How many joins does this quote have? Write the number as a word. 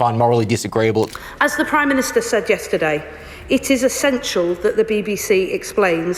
one